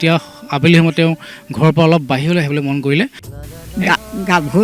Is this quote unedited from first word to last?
no; 1 cut; at 3.2 s

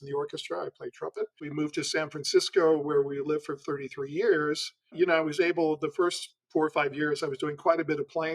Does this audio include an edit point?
yes; 2 cuts; at 1.4 s, 4.9 s

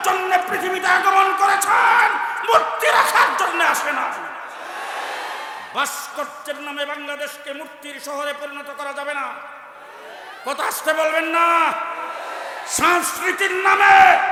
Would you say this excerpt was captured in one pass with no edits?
yes; 0 cuts

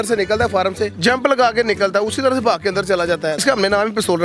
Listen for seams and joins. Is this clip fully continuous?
no; 2 cuts; at 0.9 s, 3.4 s

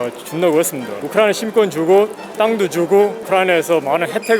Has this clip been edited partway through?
yes; 2 cuts; at 1.0 s, 3.2 s

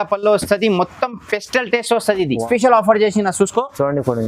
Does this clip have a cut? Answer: yes; 1 cut; at 2.4 s

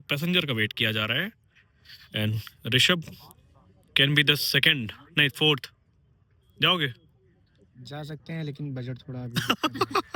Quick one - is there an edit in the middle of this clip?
no; 0 cuts

